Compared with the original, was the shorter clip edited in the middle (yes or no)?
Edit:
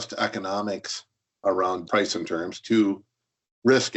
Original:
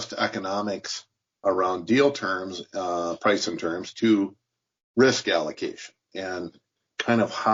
yes